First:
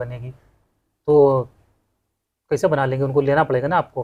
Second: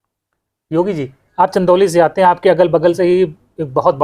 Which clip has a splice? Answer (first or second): second